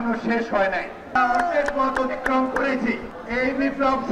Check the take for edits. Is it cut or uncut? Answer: cut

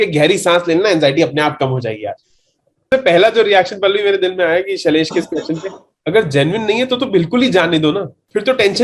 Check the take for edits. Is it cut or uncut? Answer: cut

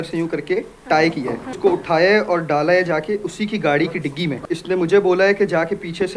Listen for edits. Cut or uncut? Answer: cut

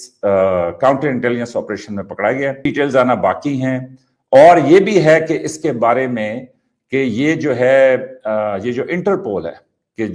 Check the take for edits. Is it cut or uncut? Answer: cut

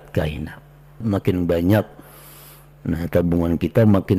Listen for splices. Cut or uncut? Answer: cut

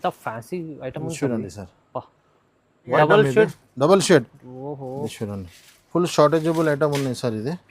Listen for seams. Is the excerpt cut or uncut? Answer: cut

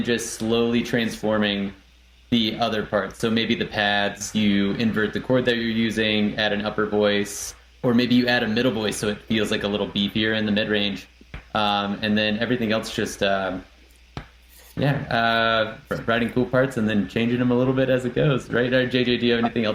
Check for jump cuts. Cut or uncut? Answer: uncut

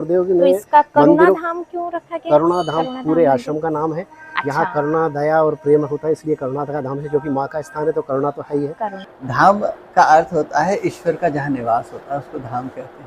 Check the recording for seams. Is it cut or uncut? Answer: cut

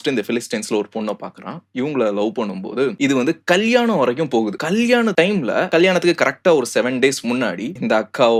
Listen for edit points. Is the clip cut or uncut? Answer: uncut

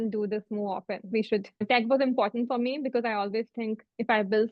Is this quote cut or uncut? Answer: cut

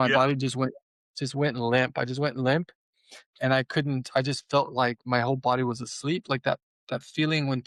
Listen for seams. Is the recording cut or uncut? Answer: uncut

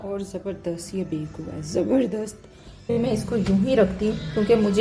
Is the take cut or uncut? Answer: cut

